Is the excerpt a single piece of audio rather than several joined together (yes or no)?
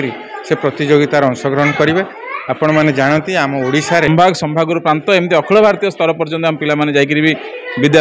no